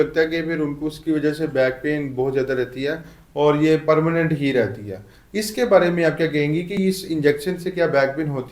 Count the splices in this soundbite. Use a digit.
0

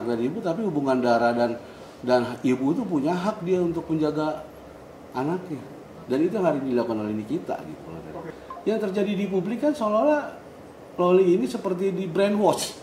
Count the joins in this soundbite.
1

